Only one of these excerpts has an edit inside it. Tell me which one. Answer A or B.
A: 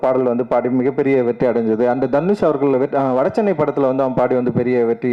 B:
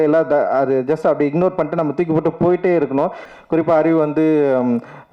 B